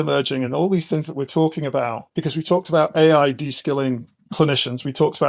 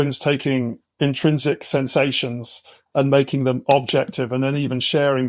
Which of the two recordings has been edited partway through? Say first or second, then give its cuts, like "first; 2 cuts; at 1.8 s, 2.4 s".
first; 2 cuts; at 2.0 s, 4.1 s